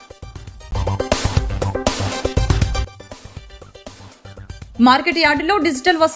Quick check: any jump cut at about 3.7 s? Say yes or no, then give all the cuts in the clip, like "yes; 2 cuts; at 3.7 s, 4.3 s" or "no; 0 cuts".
no; 1 cut; at 1.8 s